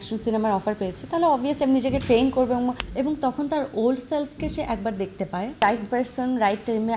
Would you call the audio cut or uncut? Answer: cut